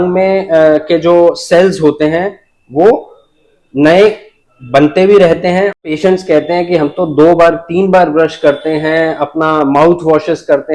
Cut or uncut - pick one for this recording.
cut